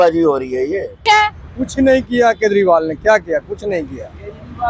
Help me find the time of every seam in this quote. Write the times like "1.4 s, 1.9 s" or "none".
1.0 s